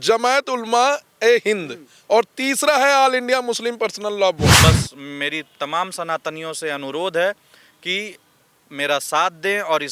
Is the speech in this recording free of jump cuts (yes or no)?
no